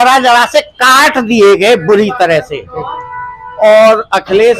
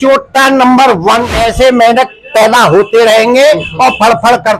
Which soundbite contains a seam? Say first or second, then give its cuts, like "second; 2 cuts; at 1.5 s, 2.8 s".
second; 1 cut; at 1.3 s